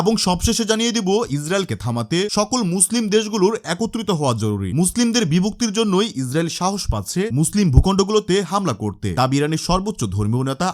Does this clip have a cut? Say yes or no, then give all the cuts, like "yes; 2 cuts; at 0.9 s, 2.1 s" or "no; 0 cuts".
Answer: no; 0 cuts